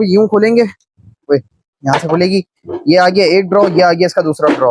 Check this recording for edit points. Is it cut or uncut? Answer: uncut